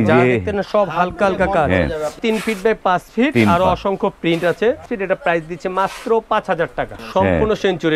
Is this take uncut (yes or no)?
no